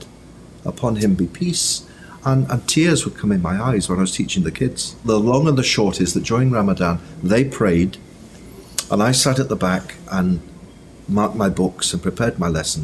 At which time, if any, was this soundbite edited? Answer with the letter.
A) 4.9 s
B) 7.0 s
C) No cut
A